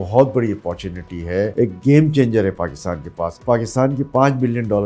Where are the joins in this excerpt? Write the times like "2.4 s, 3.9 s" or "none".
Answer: 1.5 s, 3.4 s